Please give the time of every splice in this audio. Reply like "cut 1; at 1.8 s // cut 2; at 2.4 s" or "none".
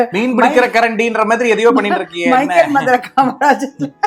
none